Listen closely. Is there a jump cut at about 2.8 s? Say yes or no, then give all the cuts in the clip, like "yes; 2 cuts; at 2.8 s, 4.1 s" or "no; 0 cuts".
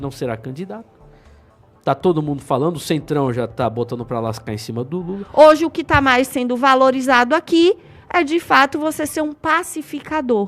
no; 1 cut; at 5.2 s